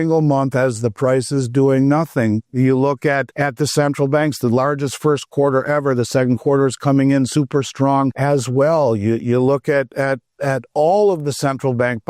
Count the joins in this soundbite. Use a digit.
2